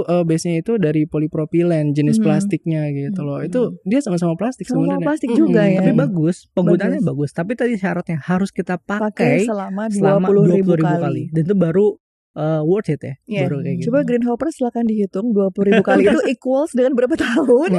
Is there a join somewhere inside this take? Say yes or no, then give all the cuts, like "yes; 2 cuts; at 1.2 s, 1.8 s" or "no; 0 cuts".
no; 0 cuts